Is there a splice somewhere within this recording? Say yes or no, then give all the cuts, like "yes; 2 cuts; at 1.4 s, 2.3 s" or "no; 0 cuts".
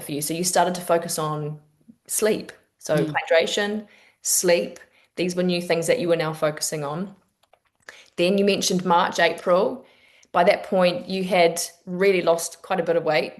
no; 0 cuts